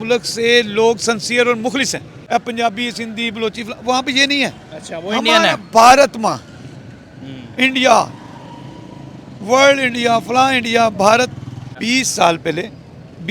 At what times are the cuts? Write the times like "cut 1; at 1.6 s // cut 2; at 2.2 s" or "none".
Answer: cut 1; at 2.1 s // cut 2; at 11.7 s